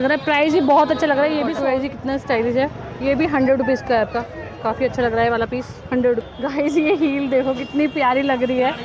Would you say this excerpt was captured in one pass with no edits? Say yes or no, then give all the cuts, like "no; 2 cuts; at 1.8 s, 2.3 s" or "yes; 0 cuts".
no; 2 cuts; at 1.1 s, 6.3 s